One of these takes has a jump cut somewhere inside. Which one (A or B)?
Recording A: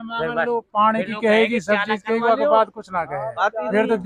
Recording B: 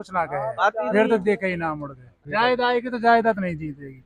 B